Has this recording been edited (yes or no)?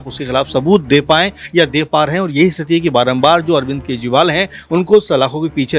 no